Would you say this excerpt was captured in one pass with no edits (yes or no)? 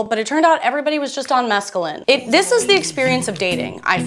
yes